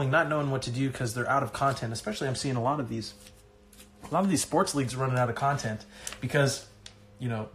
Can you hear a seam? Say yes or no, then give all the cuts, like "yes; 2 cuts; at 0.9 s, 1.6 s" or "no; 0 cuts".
no; 0 cuts